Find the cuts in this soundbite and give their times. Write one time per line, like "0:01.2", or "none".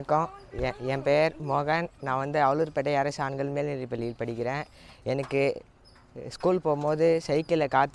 none